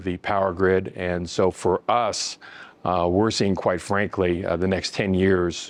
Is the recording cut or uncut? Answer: uncut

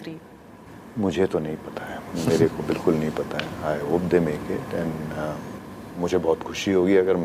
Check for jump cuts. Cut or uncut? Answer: uncut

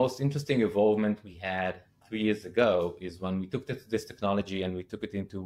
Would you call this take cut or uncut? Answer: uncut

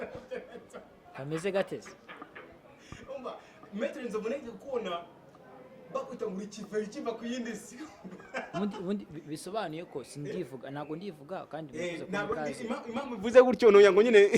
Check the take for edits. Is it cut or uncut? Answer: uncut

